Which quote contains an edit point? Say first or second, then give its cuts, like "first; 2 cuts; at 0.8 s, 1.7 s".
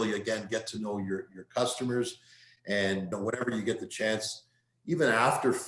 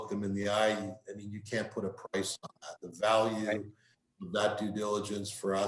first; 1 cut; at 3.1 s